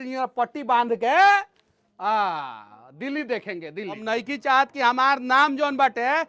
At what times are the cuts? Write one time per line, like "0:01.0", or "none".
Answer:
none